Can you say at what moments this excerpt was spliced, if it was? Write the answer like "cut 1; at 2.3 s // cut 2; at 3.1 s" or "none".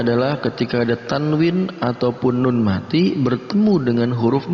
none